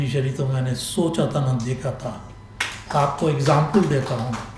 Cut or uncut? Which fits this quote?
uncut